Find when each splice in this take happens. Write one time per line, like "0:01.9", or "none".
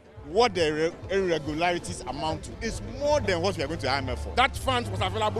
0:04.3